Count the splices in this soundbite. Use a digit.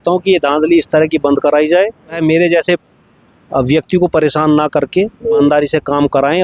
2